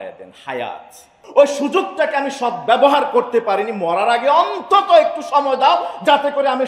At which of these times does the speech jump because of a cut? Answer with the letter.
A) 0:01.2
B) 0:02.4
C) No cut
A